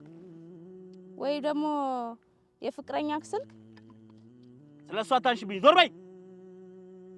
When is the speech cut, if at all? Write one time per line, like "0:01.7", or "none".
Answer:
0:03.5
0:04.9
0:05.9